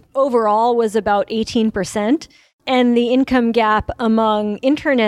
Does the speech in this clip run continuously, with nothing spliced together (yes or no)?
no